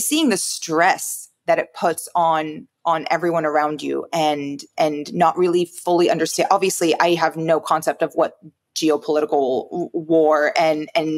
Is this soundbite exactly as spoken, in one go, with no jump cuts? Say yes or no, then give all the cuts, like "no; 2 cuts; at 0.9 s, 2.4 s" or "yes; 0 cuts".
yes; 0 cuts